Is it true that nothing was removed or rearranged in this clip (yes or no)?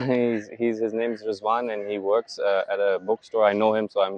yes